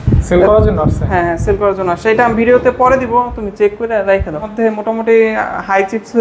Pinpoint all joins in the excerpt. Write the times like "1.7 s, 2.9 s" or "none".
4.5 s